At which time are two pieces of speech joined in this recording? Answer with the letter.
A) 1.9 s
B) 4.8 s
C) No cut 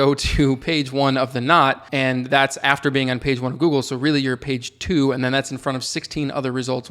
A